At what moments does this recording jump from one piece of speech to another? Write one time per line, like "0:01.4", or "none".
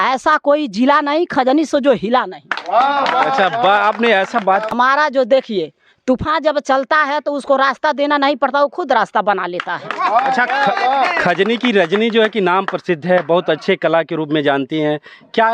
0:04.7